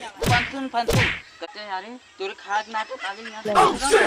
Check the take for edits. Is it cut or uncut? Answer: cut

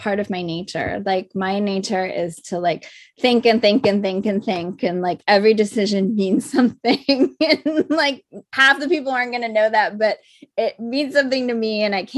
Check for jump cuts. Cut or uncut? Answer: uncut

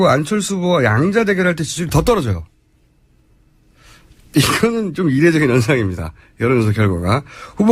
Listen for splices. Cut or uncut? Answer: cut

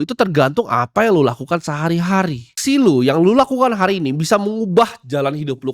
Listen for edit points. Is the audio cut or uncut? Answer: cut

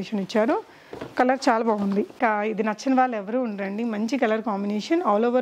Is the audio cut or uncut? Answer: cut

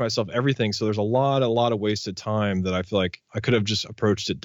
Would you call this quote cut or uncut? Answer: cut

